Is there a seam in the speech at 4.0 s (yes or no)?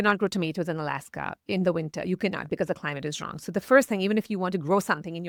no